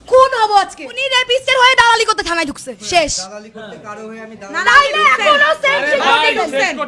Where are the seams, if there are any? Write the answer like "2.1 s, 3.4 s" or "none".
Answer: 1.1 s